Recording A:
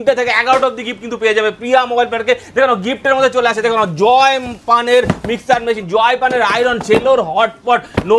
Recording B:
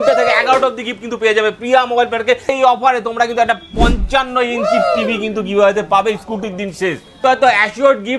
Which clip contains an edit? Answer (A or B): B